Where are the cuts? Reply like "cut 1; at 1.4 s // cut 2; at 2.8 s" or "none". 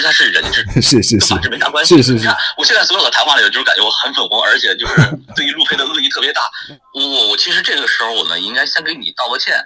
cut 1; at 2.2 s // cut 2; at 6.6 s